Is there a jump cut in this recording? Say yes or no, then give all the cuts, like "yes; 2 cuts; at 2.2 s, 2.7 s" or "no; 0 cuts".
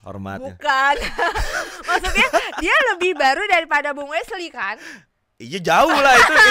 no; 0 cuts